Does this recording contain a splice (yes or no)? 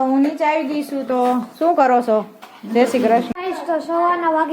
yes